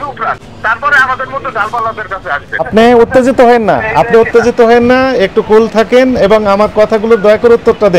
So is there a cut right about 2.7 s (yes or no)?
yes